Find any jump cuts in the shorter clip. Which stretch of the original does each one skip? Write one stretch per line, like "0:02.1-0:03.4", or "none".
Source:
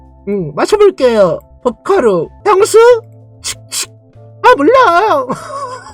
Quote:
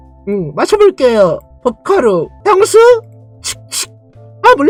none